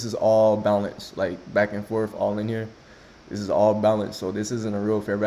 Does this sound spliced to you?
no; 0 cuts

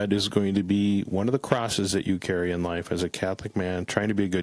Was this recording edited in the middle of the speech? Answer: no; 0 cuts

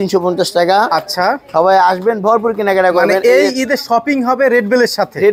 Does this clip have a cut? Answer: no; 0 cuts

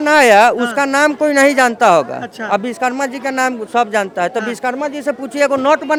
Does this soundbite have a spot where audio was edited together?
no; 0 cuts

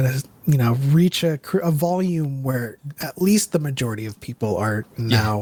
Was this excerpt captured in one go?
yes; 0 cuts

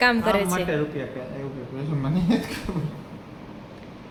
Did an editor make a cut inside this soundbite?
no; 0 cuts

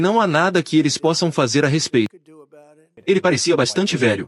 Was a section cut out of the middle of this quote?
yes; 1 cut; at 2.9 s

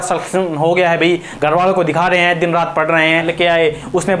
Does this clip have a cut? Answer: yes; 1 cut; at 3.3 s

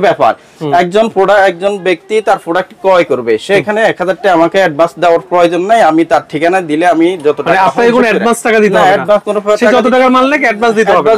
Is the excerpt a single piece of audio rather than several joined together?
yes; 0 cuts

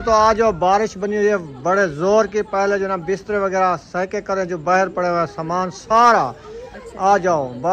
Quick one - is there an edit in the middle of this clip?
no; 0 cuts

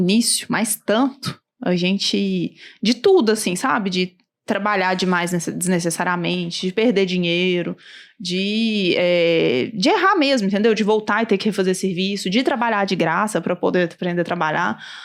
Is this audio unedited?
yes; 0 cuts

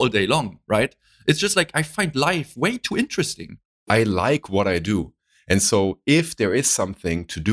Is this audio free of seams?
no; 1 cut; at 3.8 s

